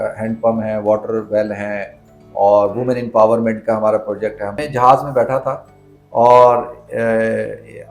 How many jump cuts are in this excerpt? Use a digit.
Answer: 1